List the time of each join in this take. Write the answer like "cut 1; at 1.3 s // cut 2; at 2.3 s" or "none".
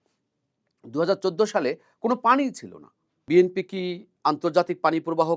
cut 1; at 3.2 s